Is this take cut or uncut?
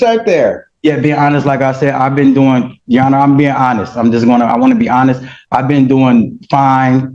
uncut